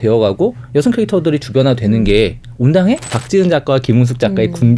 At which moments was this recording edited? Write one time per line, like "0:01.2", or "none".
0:03.1